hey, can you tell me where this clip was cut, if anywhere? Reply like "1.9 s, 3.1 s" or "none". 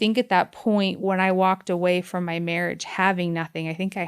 1.0 s